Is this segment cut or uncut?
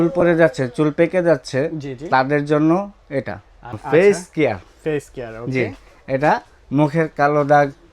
cut